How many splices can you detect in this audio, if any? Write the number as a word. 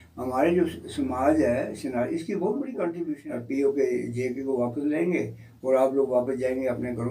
one